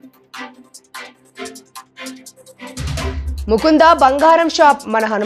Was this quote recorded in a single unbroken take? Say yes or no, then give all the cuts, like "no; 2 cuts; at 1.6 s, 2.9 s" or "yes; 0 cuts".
no; 1 cut; at 3.3 s